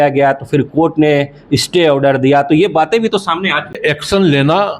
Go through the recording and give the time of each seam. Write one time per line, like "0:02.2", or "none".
0:03.8